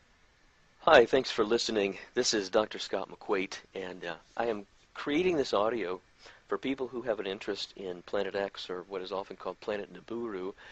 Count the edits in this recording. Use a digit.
1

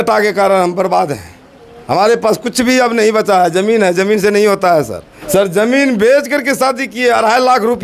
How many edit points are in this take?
1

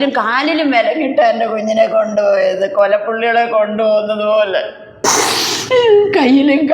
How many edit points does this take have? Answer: 1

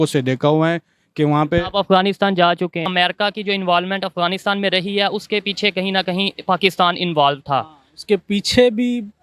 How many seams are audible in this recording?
1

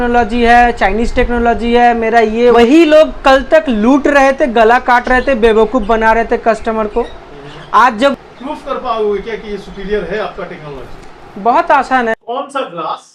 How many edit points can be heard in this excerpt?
3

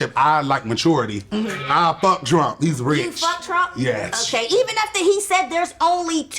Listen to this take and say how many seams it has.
1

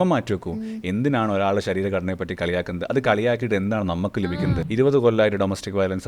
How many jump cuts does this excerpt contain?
1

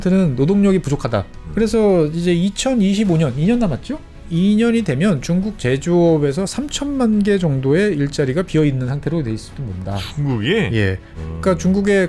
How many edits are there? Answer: 3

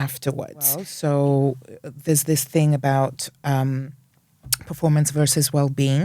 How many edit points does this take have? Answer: 1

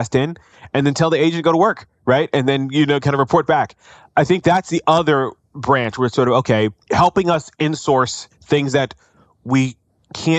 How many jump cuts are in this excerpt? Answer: 1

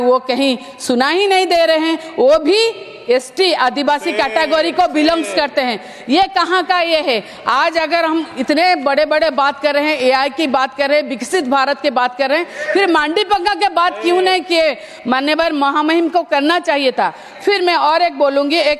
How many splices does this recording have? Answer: 0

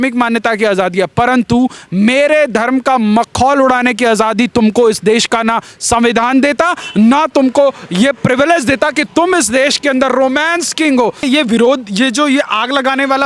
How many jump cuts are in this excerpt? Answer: 1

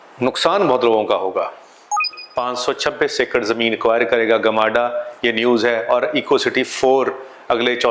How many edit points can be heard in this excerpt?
1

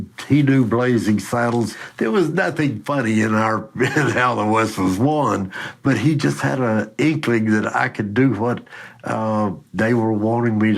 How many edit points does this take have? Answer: 0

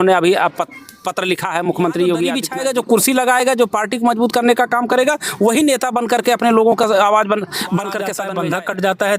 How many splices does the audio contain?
2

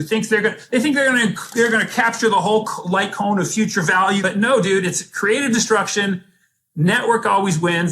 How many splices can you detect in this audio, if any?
1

